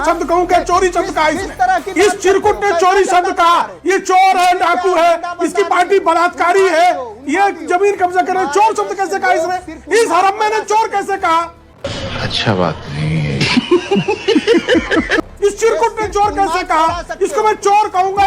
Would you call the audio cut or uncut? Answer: uncut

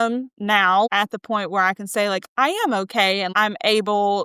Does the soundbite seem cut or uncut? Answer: cut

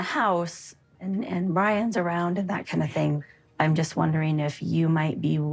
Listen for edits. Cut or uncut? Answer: uncut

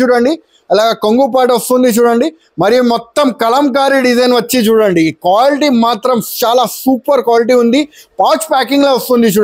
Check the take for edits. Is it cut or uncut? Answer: uncut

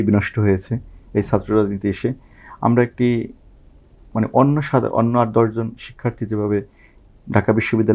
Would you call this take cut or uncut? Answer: uncut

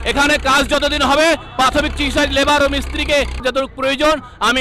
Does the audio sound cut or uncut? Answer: cut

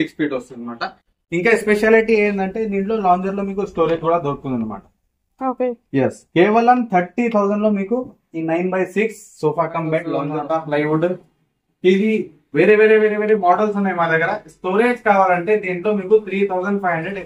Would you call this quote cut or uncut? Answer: cut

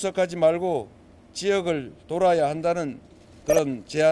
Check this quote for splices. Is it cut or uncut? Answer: uncut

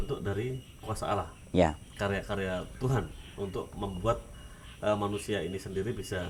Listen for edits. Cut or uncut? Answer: uncut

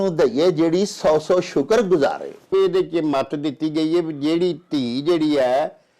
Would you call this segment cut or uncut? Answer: cut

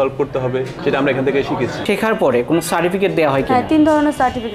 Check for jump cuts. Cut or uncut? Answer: cut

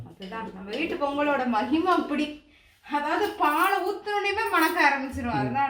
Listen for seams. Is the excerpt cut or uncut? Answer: uncut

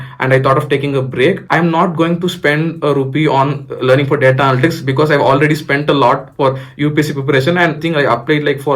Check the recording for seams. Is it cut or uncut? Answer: cut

